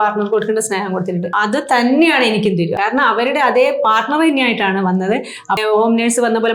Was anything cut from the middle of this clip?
yes; 3 cuts; at 1.3 s, 2.7 s, 5.6 s

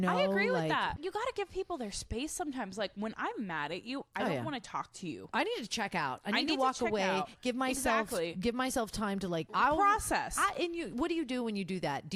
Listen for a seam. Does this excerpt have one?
yes; 2 cuts; at 1.0 s, 9.5 s

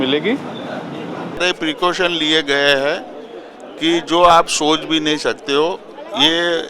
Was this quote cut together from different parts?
yes; 1 cut; at 1.4 s

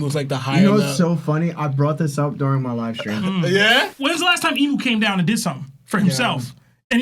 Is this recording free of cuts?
no; 1 cut; at 3.9 s

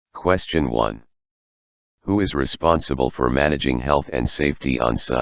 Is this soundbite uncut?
no; 1 cut; at 0.9 s

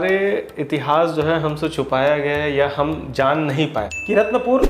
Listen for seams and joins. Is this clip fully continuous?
no; 1 cut; at 3.7 s

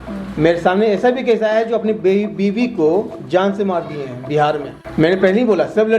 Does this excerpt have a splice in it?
yes; 1 cut; at 4.8 s

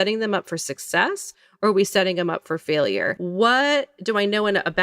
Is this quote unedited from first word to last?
no; 1 cut; at 3.1 s

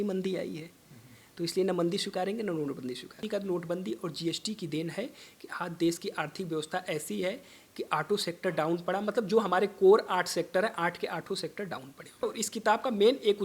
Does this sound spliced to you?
yes; 2 cuts; at 3.2 s, 12.2 s

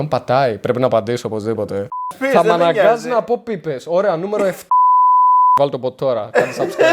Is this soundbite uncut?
no; 1 cut; at 2.0 s

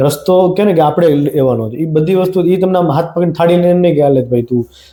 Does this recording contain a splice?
no; 0 cuts

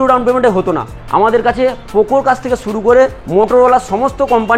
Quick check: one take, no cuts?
yes; 0 cuts

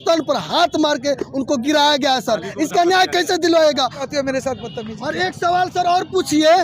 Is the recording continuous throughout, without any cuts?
no; 1 cut; at 4.1 s

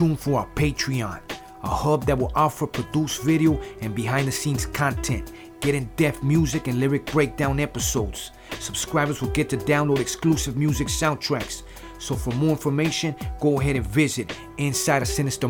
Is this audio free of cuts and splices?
yes; 0 cuts

